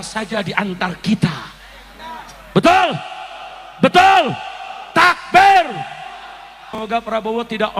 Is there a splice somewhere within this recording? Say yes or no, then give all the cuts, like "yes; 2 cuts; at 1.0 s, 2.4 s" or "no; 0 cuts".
yes; 1 cut; at 6.6 s